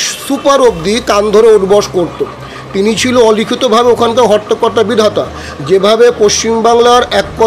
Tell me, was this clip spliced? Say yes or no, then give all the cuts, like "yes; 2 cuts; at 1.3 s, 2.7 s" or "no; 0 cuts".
no; 0 cuts